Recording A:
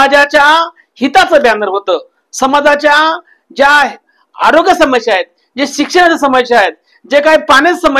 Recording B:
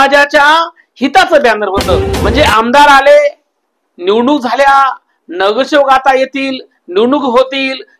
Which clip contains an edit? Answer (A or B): B